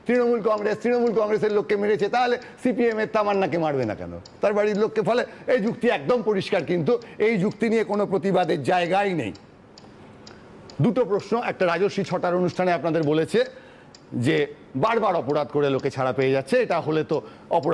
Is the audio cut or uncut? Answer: uncut